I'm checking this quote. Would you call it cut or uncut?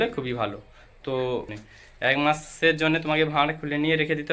cut